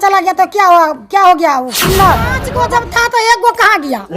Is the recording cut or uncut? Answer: cut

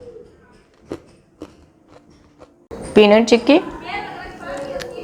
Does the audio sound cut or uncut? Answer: cut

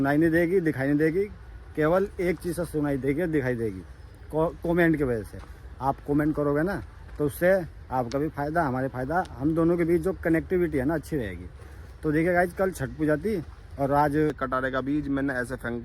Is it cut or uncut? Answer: cut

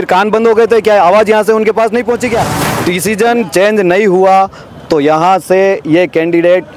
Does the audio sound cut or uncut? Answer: cut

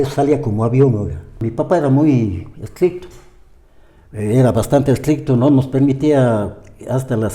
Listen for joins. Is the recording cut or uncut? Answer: cut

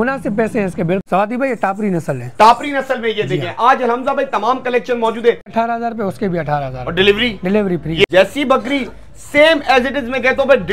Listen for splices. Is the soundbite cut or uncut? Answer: cut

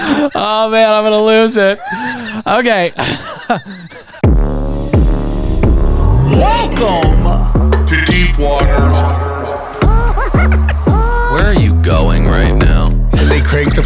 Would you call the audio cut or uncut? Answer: cut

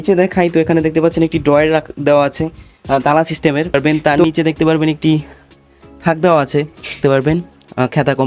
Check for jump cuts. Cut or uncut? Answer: cut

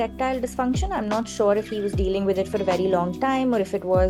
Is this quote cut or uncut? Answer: uncut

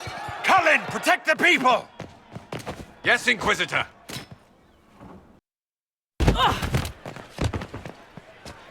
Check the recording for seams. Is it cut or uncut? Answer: cut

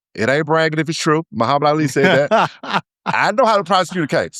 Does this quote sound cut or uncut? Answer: cut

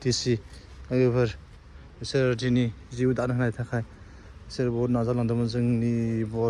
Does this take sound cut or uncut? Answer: uncut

